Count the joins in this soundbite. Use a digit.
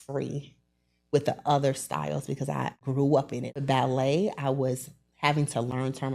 2